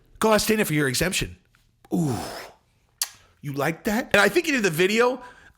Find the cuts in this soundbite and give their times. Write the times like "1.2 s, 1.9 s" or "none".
4.1 s

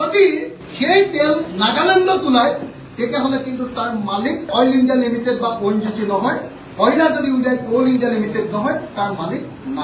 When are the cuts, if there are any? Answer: none

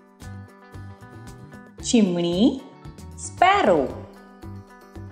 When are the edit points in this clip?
1.9 s, 4.1 s

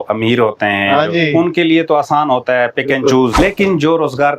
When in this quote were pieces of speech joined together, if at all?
3.4 s

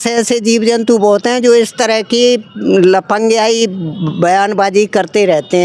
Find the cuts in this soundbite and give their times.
none

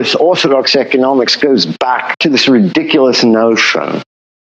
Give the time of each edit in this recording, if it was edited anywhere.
2.2 s

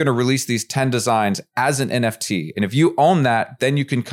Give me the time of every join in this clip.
2.5 s

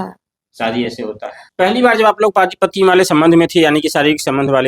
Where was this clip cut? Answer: 1.3 s

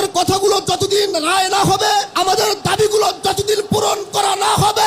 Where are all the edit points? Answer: 2.1 s

